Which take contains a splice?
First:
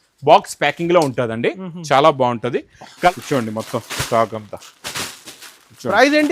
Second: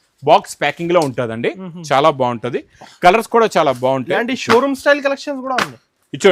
first; 1 cut; at 3.1 s

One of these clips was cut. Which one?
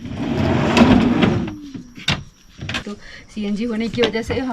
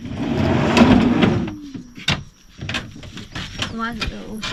first; 1 cut; at 2.8 s

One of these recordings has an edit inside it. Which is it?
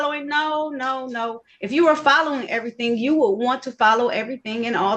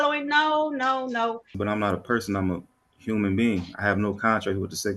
second; 1 cut; at 1.5 s

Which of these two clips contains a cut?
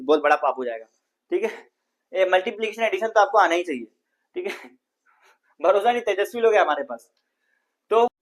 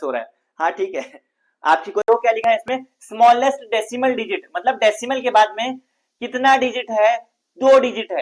second; 1 cut; at 2.1 s

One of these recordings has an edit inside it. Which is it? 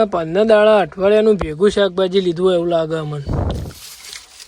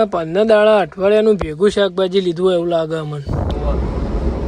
second; 1 cut; at 3.5 s

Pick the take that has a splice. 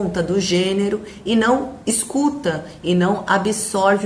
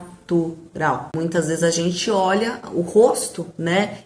second; 1 cut; at 1.1 s

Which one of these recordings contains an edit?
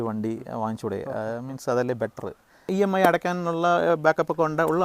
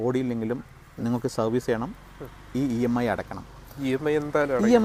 first; 1 cut; at 2.7 s

